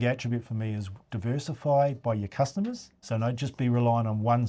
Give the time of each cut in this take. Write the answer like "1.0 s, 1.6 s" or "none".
2.9 s

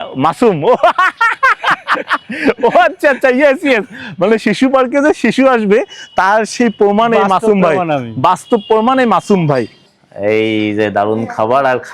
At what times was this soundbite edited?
9.8 s

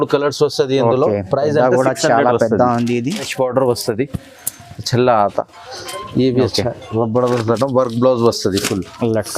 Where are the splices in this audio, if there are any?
3.3 s

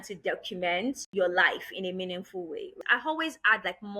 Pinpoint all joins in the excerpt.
1.0 s, 2.8 s

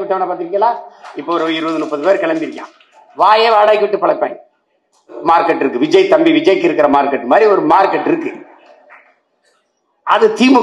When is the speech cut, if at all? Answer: 5.2 s

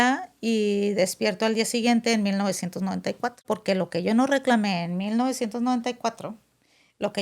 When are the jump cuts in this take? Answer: 3.4 s

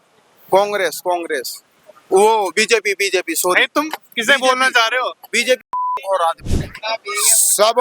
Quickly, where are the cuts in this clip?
6.5 s

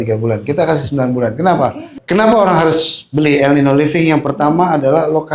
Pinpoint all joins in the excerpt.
2.0 s

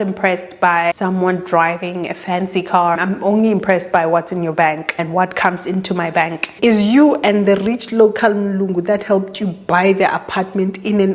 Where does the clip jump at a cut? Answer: 1.0 s, 3.0 s, 4.9 s, 6.5 s

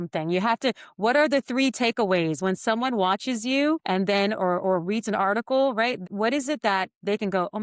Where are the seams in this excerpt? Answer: 3.8 s, 6.1 s

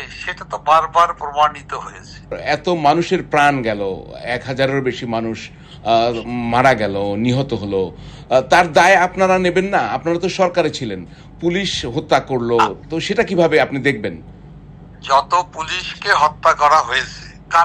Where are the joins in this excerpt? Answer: 2.4 s

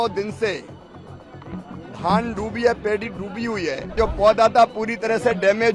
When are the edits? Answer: 3.9 s

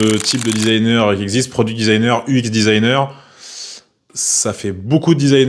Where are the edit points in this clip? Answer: 4.0 s

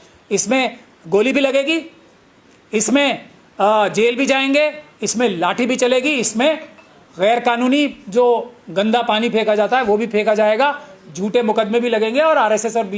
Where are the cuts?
none

